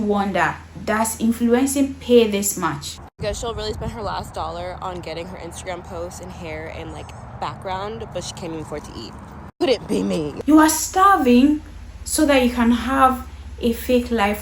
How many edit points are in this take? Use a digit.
2